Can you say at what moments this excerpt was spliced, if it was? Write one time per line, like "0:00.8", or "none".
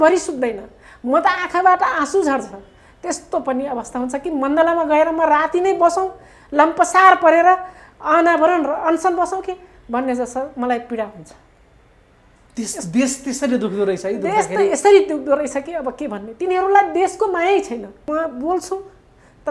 0:18.0